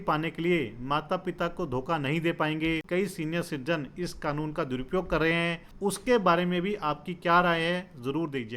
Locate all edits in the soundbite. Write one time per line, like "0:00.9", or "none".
0:02.8
0:05.7